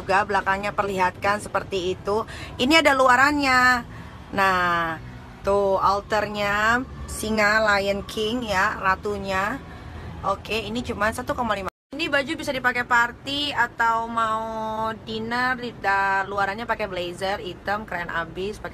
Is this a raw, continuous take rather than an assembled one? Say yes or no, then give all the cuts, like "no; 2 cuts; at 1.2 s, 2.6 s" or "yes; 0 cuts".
no; 1 cut; at 2.3 s